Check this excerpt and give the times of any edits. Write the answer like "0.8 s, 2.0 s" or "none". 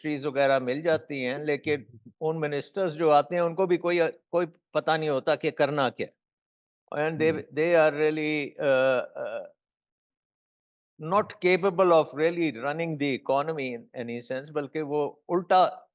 none